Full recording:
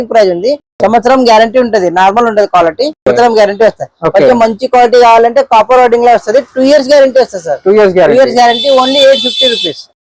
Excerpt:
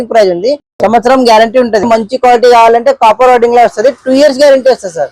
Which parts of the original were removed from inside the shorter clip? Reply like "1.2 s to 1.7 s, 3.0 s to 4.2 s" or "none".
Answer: 1.8 s to 4.3 s